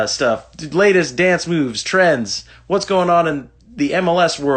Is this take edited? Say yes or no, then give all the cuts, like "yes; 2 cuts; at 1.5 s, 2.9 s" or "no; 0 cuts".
no; 0 cuts